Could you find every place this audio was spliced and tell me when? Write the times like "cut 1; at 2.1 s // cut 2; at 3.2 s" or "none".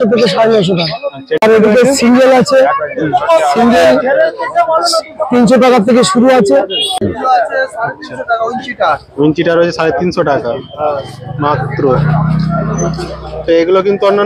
cut 1; at 1.4 s // cut 2; at 7.0 s